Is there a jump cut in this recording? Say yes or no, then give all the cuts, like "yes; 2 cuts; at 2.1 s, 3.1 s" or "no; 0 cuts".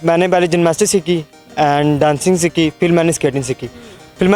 no; 0 cuts